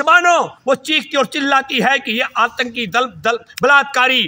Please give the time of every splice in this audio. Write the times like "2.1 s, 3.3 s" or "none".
none